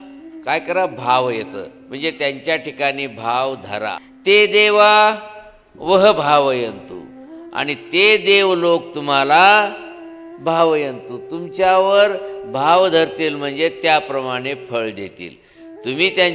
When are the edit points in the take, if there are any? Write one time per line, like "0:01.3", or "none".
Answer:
0:04.1